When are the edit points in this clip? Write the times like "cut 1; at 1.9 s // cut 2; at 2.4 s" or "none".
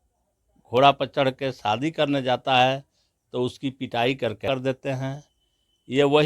cut 1; at 4.4 s